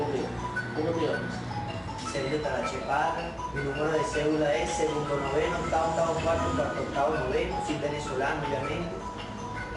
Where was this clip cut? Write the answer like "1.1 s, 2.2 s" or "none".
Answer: none